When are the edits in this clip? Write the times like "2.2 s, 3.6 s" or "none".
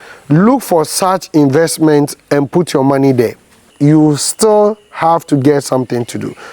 3.7 s